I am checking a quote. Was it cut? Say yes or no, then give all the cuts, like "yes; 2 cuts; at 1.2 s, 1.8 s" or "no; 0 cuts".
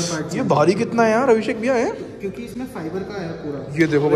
no; 0 cuts